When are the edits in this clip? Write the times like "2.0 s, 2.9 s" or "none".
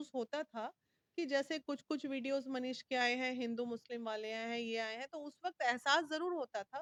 none